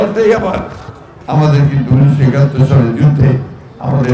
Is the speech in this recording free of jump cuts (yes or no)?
yes